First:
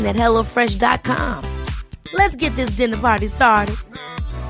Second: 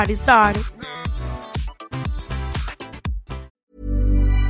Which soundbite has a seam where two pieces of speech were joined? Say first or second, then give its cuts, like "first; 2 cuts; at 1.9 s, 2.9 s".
second; 1 cut; at 3.4 s